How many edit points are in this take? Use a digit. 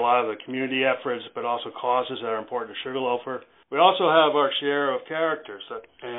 1